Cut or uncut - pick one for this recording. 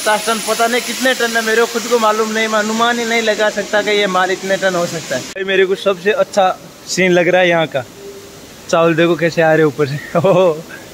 uncut